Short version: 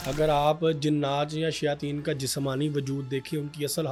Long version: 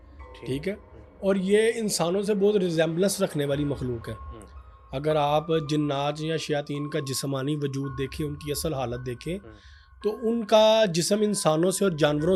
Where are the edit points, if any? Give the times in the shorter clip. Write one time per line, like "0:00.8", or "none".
none